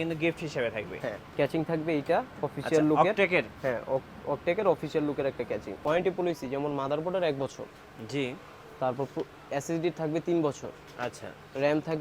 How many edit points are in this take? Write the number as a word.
two